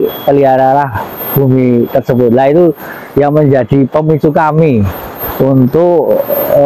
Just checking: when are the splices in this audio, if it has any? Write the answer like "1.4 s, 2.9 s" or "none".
none